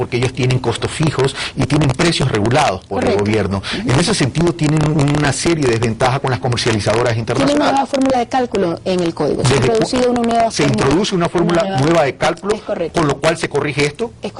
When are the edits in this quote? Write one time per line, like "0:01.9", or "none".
0:05.2